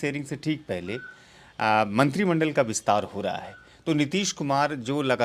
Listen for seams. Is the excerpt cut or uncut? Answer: uncut